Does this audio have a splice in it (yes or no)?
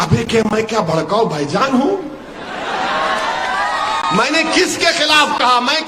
no